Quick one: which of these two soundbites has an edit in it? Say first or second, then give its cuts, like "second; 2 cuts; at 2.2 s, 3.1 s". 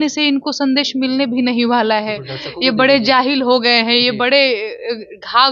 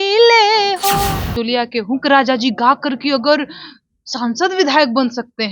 second; 1 cut; at 1.3 s